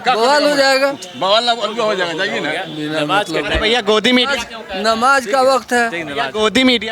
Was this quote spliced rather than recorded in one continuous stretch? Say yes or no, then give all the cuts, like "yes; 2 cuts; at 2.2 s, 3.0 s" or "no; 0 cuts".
no; 0 cuts